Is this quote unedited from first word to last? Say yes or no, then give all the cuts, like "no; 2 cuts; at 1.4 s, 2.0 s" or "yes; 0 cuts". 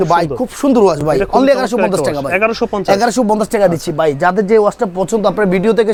yes; 0 cuts